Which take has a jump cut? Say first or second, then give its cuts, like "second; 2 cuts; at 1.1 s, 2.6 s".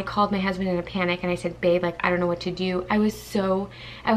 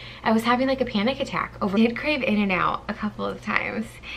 second; 1 cut; at 1.7 s